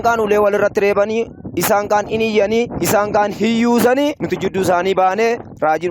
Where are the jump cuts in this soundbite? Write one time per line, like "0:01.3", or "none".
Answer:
0:04.2

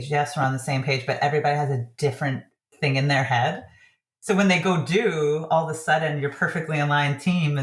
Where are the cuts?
none

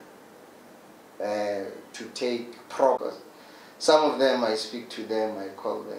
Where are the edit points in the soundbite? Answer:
0:03.0

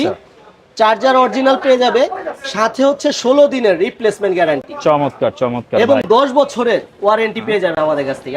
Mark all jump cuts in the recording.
none

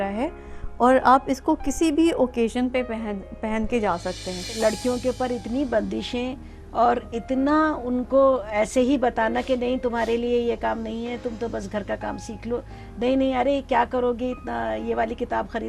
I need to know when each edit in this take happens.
0:04.6

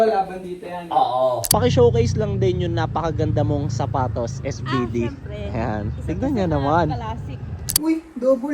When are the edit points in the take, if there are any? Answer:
0:01.5
0:07.8

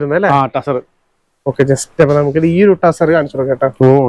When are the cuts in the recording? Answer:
none

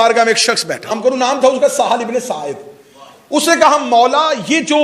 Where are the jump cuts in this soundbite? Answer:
0:00.9

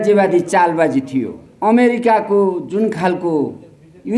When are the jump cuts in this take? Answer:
0:01.4

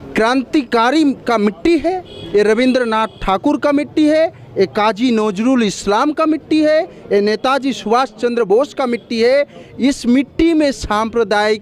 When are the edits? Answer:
none

